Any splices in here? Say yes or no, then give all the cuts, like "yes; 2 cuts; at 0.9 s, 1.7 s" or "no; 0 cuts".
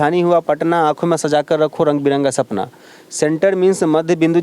no; 0 cuts